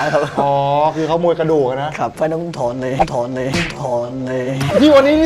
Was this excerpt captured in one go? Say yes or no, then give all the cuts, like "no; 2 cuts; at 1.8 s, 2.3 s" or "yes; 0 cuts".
no; 1 cut; at 2.1 s